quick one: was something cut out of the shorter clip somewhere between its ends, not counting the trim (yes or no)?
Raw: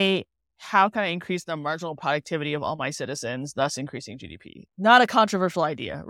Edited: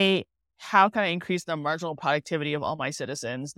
no